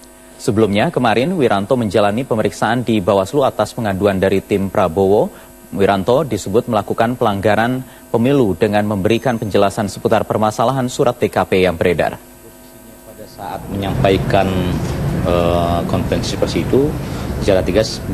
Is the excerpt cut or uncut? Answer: uncut